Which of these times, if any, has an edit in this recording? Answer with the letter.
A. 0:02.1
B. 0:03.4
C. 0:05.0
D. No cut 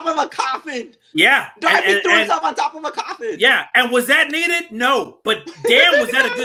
D